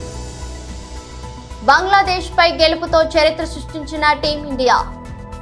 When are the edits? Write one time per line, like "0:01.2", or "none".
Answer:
0:00.9